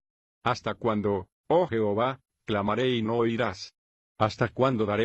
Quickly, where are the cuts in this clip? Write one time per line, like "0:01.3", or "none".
0:02.3

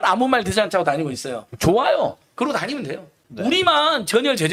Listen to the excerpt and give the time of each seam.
none

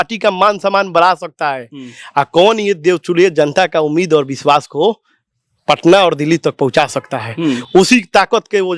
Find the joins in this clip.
none

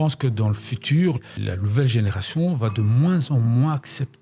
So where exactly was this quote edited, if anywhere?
0:01.2

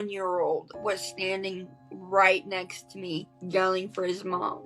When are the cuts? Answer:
0:03.3

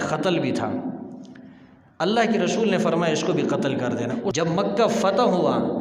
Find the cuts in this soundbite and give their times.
0:04.3

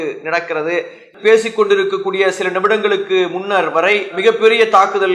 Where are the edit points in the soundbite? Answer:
0:01.1

